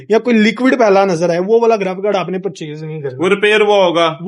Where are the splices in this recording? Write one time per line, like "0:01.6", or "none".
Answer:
none